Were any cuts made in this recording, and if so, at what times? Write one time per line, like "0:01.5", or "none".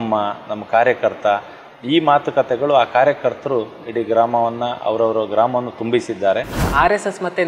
0:06.6